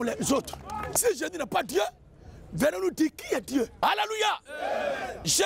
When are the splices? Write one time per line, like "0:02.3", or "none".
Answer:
0:00.9
0:03.7